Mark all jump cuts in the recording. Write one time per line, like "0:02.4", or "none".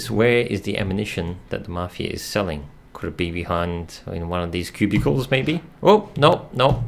none